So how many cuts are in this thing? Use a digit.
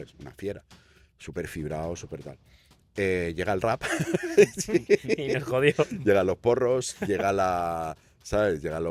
0